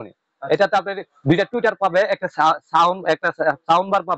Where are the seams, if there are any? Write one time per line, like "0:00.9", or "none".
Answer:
none